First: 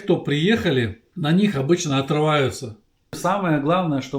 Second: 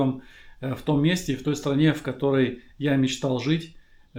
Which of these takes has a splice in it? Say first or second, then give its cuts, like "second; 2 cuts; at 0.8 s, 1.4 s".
first; 2 cuts; at 1.0 s, 3.2 s